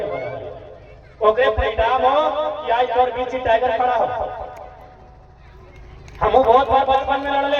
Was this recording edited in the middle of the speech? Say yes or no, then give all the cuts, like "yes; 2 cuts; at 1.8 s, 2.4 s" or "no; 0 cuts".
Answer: no; 0 cuts